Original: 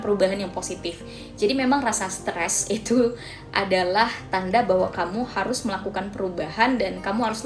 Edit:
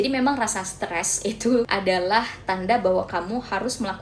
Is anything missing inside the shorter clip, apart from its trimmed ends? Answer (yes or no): yes